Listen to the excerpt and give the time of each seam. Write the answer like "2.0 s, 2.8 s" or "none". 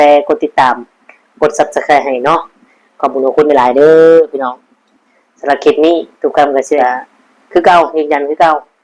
6.8 s